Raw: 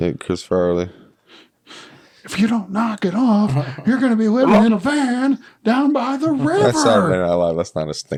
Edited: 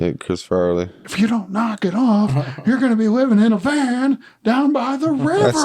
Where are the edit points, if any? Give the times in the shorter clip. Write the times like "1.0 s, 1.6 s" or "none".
1.0 s